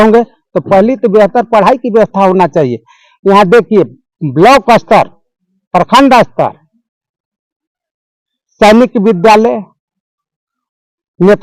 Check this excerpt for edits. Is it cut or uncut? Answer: uncut